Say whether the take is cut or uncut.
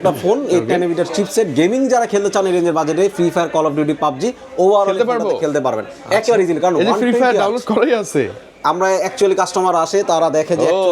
uncut